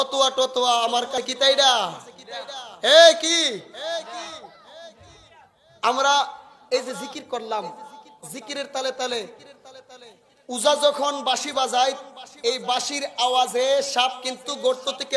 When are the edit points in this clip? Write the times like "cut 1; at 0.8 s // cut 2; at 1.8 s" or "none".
cut 1; at 1.2 s